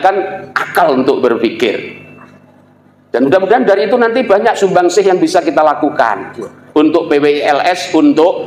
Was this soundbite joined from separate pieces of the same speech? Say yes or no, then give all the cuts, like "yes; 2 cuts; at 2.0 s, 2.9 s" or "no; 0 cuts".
no; 0 cuts